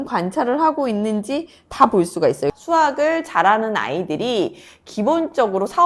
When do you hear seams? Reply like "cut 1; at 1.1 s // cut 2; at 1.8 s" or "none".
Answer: cut 1; at 2.5 s